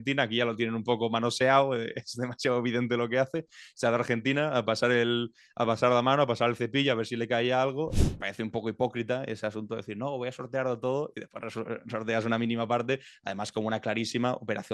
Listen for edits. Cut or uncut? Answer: cut